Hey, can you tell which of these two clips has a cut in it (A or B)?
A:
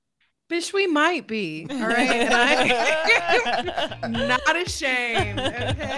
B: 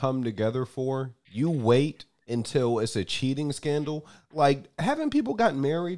B